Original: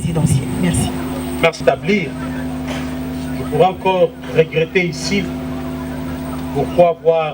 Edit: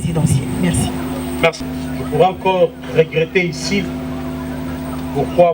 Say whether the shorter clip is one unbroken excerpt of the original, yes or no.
no